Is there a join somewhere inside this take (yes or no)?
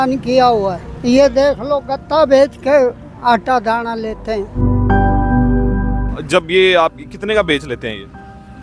no